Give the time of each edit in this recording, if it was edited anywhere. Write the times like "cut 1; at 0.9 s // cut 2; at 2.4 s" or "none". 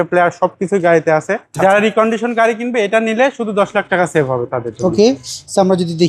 cut 1; at 1.4 s